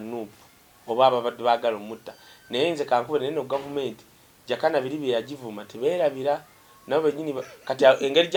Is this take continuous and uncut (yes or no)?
yes